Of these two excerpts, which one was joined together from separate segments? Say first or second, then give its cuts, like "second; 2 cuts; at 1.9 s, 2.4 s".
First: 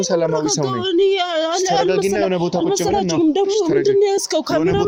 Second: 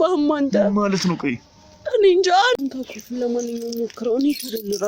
second; 1 cut; at 2.6 s